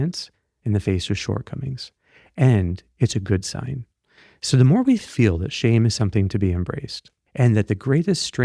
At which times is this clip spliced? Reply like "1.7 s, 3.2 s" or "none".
7.2 s